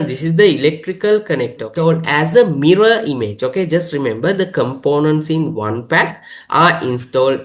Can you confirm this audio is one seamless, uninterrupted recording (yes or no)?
no